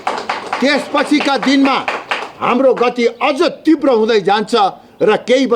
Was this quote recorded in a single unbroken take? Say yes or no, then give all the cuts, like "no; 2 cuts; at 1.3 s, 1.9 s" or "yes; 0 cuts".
yes; 0 cuts